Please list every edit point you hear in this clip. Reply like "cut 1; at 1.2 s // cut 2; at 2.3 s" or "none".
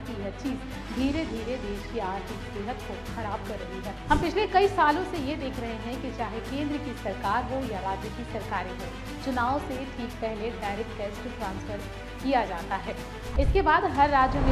cut 1; at 13.1 s

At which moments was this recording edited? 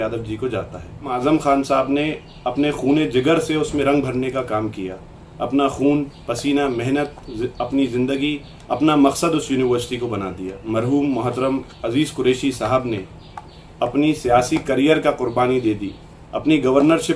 cut 1; at 1.1 s // cut 2; at 10.5 s

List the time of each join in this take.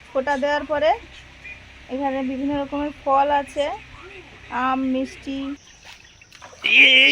cut 1; at 5.6 s

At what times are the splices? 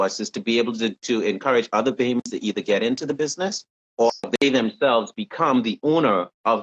none

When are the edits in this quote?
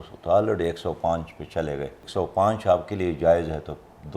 cut 1; at 2.0 s

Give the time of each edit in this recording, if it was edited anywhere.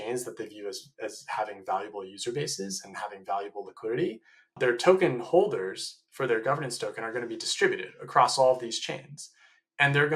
cut 1; at 4.6 s

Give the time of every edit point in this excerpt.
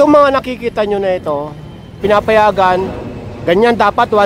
cut 1; at 2.0 s

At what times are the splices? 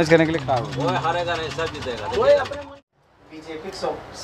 cut 1; at 2.7 s

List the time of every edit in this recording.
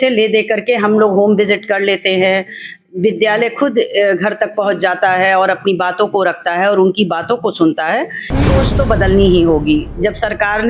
cut 1; at 8.5 s

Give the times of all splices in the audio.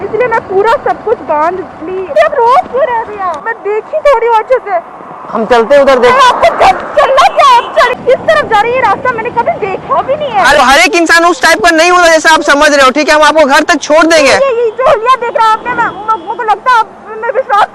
cut 1; at 2.2 s // cut 2; at 3.4 s // cut 3; at 8.0 s // cut 4; at 10.5 s

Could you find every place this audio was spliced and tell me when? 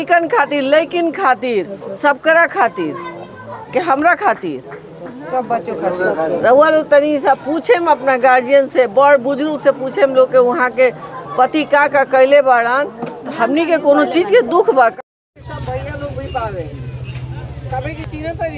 none

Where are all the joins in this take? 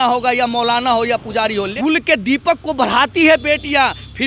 cut 1; at 1.7 s

